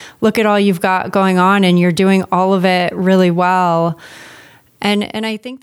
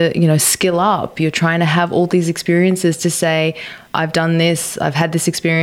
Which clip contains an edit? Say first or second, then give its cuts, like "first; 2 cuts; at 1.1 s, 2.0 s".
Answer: second; 1 cut; at 3.8 s